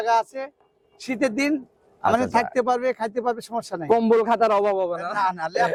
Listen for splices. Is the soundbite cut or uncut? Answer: uncut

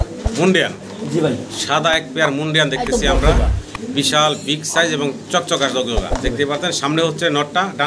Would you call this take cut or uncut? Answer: uncut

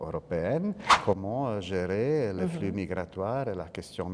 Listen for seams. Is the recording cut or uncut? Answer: cut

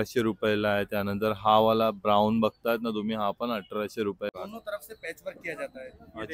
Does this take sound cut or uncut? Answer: cut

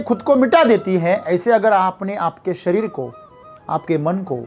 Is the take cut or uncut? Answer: uncut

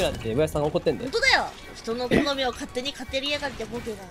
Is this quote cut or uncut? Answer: uncut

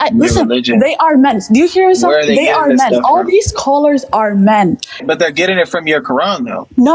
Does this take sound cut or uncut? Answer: cut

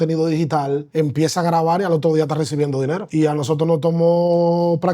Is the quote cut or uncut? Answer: cut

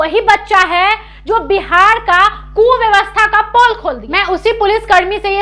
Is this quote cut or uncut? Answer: cut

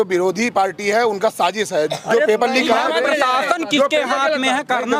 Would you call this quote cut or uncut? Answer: uncut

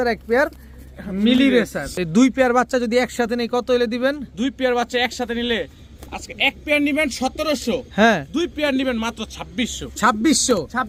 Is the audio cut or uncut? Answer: uncut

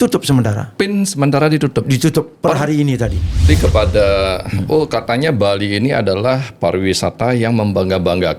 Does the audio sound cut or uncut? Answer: cut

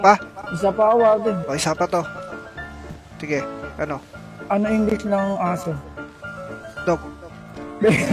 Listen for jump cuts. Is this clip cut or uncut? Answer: uncut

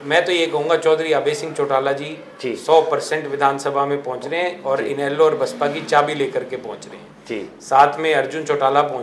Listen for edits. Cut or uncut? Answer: uncut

